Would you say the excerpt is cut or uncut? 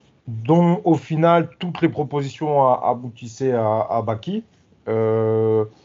uncut